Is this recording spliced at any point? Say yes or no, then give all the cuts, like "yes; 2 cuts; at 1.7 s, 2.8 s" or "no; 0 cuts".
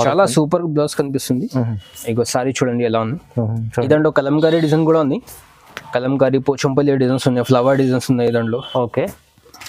no; 0 cuts